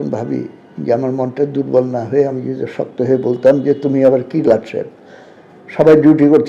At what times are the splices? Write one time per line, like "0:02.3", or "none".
none